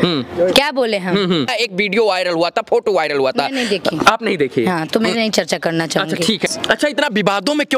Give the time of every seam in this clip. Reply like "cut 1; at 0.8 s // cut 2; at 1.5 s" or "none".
cut 1; at 1.5 s // cut 2; at 6.5 s